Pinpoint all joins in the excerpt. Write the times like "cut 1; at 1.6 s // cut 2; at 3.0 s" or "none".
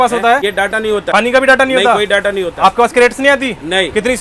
cut 1; at 0.9 s